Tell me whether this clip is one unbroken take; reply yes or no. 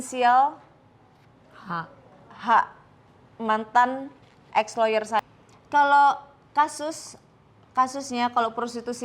no